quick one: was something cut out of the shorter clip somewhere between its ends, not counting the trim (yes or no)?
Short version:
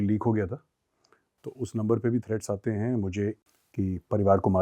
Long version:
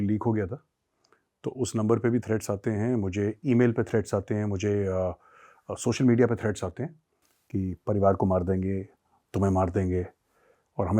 yes